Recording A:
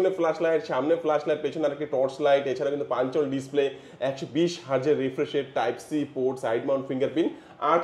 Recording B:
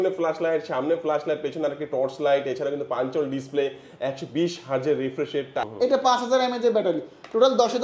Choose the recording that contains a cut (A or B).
B